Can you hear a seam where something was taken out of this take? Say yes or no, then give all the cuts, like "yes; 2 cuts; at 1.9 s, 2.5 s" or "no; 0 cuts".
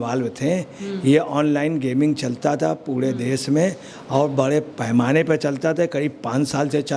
no; 0 cuts